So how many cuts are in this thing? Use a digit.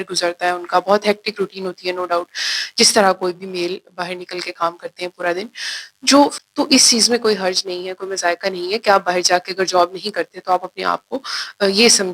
1